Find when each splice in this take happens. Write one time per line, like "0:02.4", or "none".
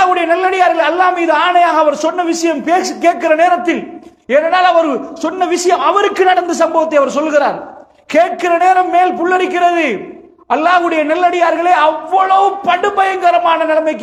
none